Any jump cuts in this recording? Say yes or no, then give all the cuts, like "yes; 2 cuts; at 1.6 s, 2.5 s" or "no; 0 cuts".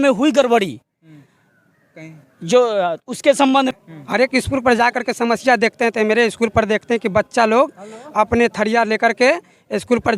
yes; 1 cut; at 3.7 s